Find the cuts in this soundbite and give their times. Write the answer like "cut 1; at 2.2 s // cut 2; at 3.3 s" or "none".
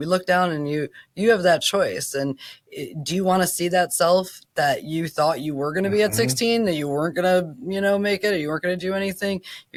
none